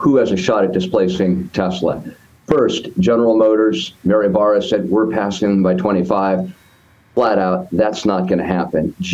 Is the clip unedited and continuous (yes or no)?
yes